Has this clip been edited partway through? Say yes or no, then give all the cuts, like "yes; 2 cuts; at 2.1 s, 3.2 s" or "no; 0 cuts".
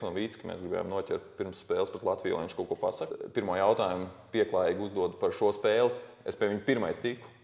yes; 1 cut; at 3.1 s